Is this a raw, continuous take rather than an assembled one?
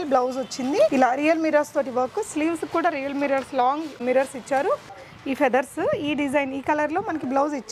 no; 3 cuts; at 0.9 s, 4.0 s, 5.0 s

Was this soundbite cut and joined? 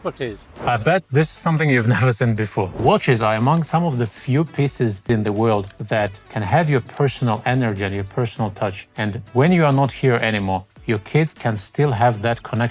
yes; 6 cuts; at 0.9 s, 2.7 s, 5.1 s, 6.1 s, 8.8 s, 10.7 s

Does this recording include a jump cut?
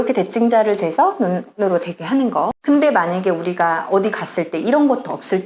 yes; 1 cut; at 2.6 s

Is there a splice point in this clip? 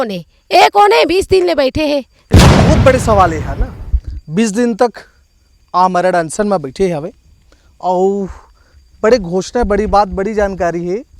yes; 1 cut; at 2.2 s

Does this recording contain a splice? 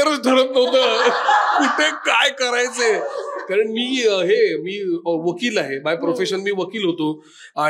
no; 0 cuts

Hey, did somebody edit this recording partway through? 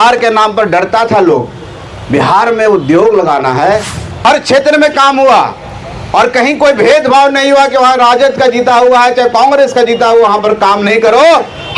yes; 1 cut; at 4.0 s

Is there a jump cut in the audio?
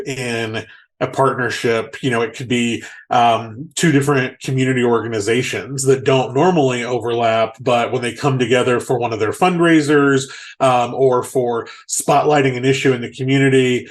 no; 0 cuts

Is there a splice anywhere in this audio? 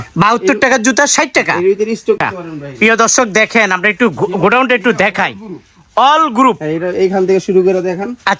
yes; 1 cut; at 2.2 s

